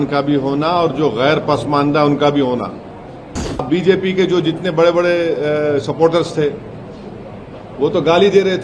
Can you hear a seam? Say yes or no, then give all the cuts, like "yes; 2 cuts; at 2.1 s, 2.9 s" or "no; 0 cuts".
yes; 1 cut; at 3.7 s